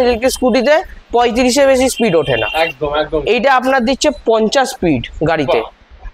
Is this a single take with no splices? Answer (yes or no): yes